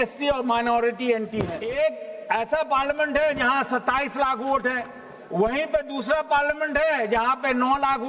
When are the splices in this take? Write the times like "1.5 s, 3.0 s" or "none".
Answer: 1.6 s